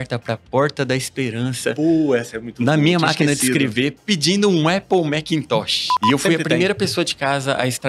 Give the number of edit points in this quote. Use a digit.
1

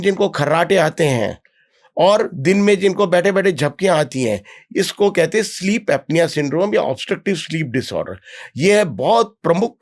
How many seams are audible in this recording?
0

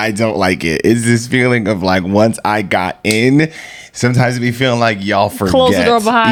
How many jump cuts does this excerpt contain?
0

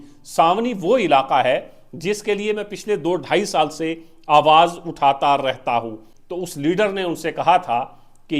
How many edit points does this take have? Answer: 1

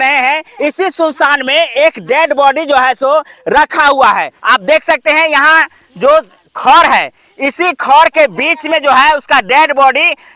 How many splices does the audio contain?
1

